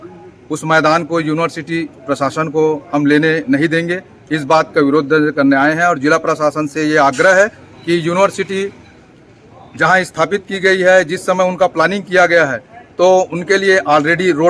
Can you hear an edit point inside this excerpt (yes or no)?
no